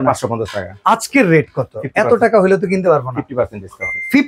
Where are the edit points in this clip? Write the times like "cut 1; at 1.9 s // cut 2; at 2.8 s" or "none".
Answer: none